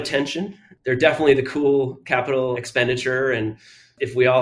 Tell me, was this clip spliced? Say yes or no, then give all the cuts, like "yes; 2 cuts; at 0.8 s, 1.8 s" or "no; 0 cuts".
yes; 1 cut; at 2.6 s